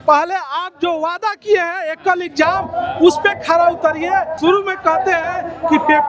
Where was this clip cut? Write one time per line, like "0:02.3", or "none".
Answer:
0:04.3